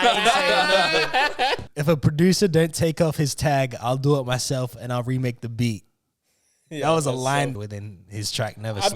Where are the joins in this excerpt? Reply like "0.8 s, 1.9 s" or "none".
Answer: 1.6 s, 7.5 s